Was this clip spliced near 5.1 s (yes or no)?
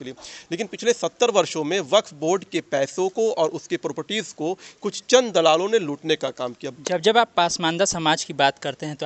no